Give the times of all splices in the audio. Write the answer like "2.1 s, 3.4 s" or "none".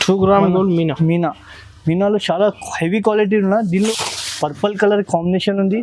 3.9 s